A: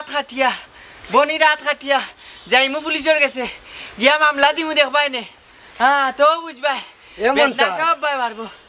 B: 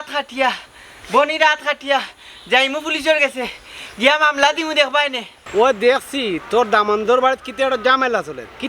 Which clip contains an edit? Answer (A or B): B